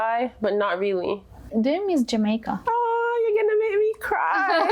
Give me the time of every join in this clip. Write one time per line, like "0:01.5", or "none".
0:01.5
0:02.5